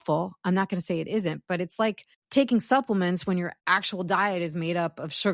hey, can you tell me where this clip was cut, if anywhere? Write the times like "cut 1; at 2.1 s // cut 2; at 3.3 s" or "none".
cut 1; at 2.1 s // cut 2; at 3.6 s